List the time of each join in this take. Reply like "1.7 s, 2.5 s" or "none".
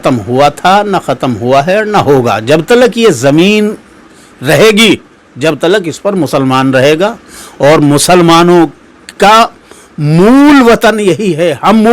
none